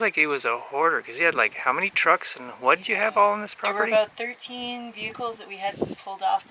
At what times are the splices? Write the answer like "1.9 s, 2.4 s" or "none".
none